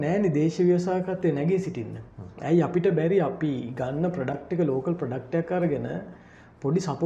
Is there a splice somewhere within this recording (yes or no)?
no